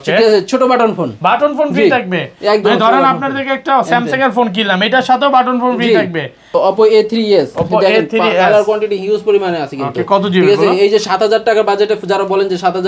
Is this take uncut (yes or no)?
no